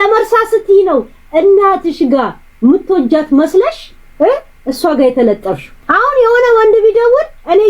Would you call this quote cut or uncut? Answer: cut